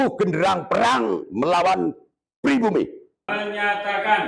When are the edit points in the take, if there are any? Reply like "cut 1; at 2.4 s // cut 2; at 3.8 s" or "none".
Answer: cut 1; at 3.3 s